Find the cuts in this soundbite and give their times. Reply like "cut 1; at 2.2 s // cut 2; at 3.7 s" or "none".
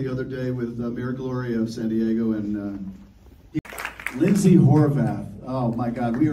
cut 1; at 3.6 s